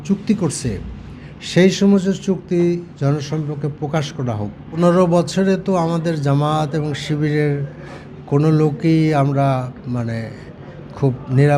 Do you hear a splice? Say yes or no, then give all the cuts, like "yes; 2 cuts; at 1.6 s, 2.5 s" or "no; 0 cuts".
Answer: yes; 1 cut; at 4.7 s